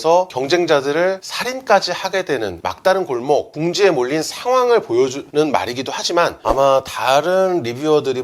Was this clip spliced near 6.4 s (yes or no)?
yes